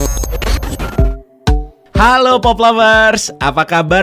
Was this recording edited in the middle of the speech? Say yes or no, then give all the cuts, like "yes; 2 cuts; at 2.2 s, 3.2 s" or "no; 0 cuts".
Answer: yes; 1 cut; at 0.9 s